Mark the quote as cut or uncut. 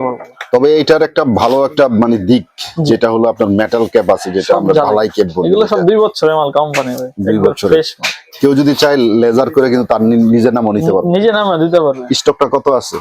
uncut